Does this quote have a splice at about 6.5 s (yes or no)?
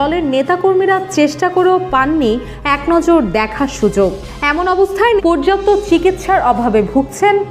no